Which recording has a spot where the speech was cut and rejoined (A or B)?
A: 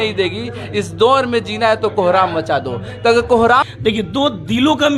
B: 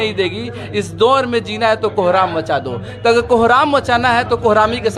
A